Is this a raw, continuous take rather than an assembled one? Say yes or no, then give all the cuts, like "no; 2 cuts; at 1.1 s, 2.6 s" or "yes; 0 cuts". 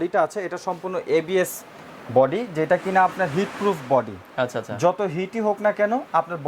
yes; 0 cuts